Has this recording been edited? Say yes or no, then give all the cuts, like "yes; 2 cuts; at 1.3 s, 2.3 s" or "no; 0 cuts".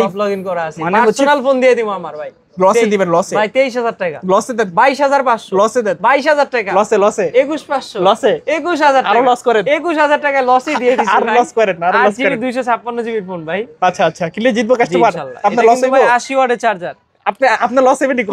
no; 0 cuts